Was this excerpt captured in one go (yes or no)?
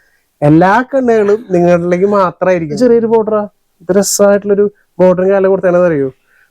no